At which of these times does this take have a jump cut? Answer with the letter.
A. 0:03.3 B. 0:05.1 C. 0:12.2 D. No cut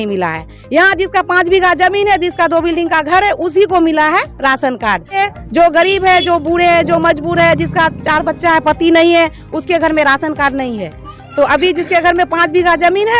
B